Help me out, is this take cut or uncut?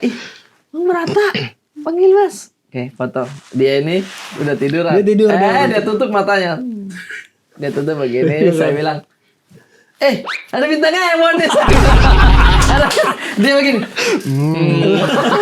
uncut